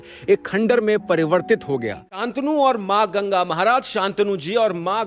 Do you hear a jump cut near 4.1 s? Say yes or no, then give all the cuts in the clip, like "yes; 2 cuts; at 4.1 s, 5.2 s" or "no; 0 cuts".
no; 1 cut; at 2.2 s